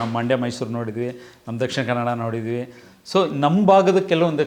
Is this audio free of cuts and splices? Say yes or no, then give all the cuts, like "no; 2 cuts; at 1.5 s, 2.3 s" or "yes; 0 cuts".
yes; 0 cuts